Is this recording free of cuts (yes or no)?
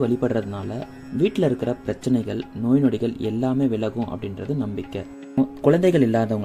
no